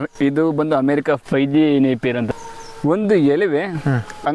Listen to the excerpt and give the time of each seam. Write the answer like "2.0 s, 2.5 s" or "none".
2.3 s